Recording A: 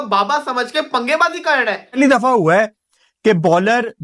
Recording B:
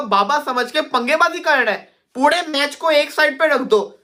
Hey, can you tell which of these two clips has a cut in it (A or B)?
A